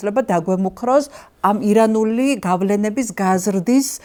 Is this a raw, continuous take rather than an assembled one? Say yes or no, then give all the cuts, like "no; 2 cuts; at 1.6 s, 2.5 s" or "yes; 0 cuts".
yes; 0 cuts